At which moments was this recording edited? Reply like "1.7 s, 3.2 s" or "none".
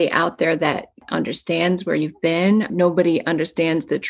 1.0 s, 2.7 s